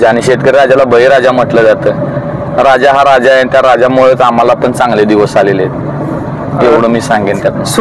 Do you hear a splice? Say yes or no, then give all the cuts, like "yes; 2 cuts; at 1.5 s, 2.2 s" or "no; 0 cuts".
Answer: no; 0 cuts